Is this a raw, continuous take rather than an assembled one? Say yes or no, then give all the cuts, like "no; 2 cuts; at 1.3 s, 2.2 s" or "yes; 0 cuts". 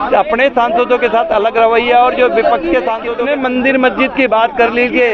no; 1 cut; at 3.1 s